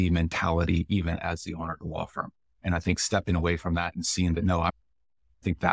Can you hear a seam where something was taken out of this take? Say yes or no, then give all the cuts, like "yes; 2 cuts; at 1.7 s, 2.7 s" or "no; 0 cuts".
yes; 1 cut; at 4.7 s